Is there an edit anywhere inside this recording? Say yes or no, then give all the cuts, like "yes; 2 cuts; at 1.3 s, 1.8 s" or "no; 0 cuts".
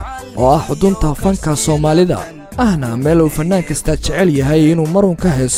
no; 0 cuts